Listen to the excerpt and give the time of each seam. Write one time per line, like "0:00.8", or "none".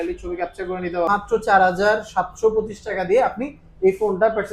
0:01.1